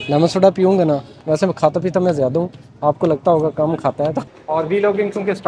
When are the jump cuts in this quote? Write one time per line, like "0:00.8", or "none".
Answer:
0:01.2
0:04.3